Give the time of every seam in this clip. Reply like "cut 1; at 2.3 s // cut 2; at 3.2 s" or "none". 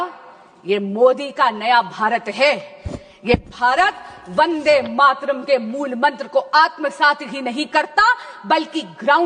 none

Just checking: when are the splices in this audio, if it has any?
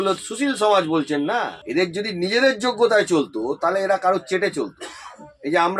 cut 1; at 1.6 s

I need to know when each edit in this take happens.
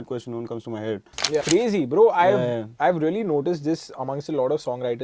cut 1; at 1.4 s

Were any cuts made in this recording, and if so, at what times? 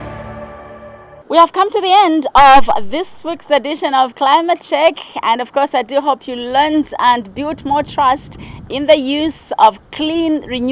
none

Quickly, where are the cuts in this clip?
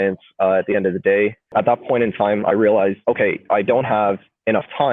cut 1; at 1.5 s // cut 2; at 3.0 s

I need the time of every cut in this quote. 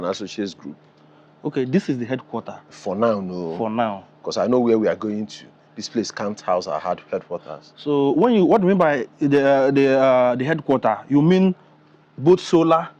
none

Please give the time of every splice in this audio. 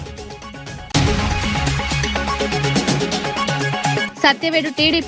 cut 1; at 0.9 s // cut 2; at 2.2 s // cut 3; at 3.6 s

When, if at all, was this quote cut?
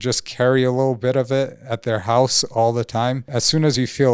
cut 1; at 3.2 s

